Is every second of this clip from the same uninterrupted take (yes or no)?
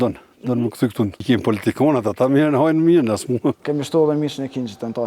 no